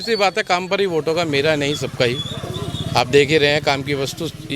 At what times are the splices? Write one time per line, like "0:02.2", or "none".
none

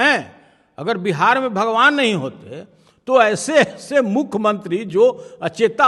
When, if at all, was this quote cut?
none

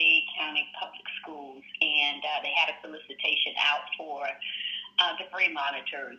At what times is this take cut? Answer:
none

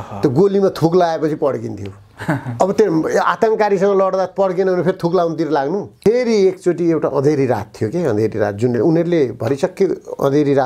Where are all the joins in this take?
0:05.9

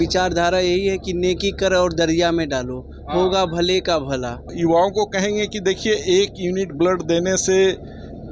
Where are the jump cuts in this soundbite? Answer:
0:04.4

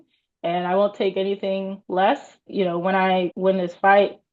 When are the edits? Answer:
0:01.8
0:02.5
0:03.3

